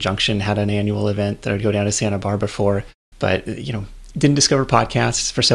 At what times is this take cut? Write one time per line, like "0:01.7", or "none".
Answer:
0:03.0